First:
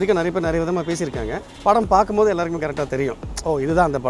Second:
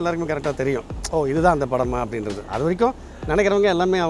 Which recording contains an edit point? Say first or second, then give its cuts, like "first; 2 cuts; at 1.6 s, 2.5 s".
first; 1 cut; at 1.4 s